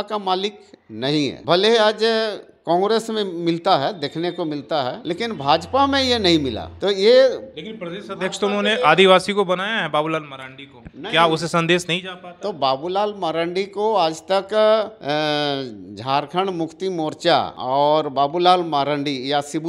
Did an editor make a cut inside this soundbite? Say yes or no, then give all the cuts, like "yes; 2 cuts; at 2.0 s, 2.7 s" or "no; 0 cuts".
no; 0 cuts